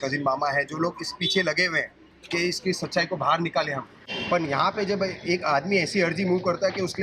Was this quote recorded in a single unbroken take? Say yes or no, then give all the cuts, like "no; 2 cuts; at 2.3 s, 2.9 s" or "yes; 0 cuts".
no; 1 cut; at 4.0 s